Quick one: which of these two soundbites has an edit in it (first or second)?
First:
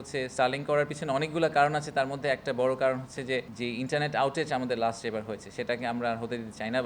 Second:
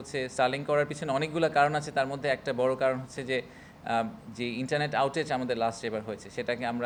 first